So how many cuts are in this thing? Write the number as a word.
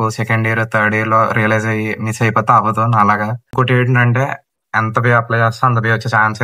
one